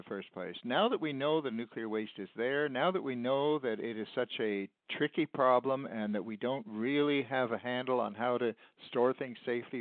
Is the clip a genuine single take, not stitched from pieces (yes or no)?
yes